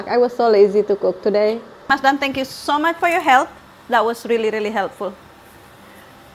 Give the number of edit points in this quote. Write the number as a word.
one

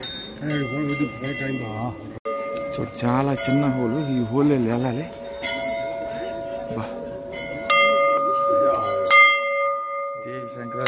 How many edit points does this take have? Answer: one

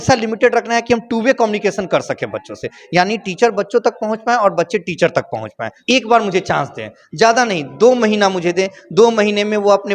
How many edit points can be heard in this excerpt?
one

